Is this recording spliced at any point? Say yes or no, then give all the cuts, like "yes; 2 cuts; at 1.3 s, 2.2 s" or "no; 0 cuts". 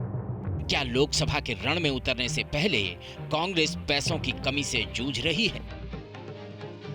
no; 0 cuts